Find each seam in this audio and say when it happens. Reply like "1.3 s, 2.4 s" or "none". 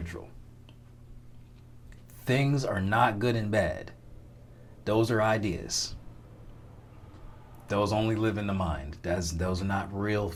none